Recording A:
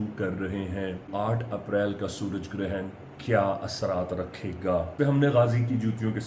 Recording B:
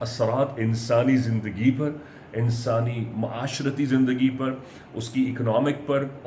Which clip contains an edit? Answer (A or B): A